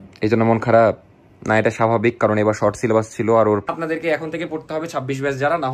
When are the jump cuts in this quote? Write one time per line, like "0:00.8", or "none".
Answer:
0:03.7